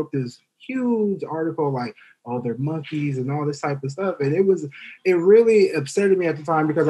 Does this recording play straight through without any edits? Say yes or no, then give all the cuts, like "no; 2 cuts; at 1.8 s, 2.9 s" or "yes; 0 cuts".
yes; 0 cuts